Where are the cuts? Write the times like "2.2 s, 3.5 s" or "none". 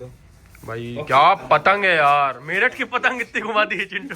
none